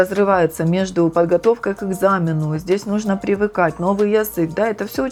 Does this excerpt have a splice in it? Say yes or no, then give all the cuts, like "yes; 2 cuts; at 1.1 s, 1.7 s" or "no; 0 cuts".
no; 0 cuts